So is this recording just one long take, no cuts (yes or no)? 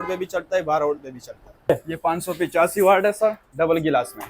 no